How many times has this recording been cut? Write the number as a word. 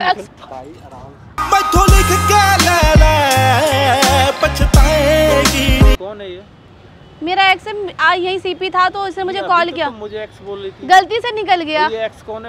one